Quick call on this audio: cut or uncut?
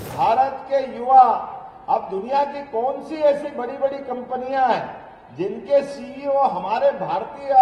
uncut